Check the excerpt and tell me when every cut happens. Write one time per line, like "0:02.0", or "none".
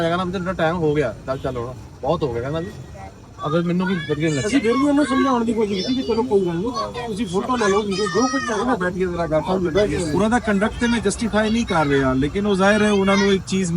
0:10.1